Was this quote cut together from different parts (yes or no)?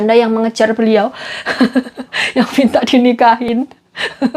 no